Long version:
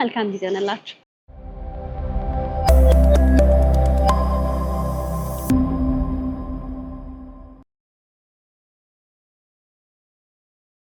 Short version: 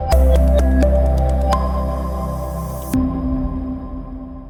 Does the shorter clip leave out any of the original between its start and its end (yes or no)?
no